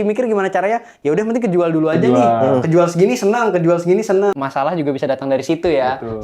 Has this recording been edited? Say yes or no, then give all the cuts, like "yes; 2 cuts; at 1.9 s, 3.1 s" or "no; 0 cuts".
yes; 1 cut; at 4.4 s